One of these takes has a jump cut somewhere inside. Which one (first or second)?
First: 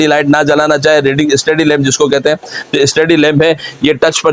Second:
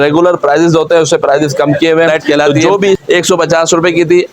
second